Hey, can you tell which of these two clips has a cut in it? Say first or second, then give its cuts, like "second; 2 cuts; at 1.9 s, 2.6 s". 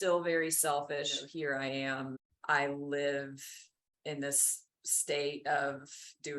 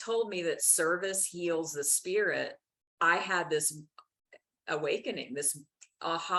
first; 2 cuts; at 1.2 s, 2.3 s